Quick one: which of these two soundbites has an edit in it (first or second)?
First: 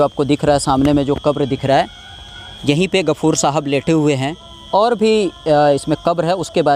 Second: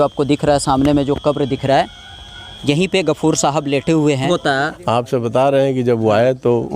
second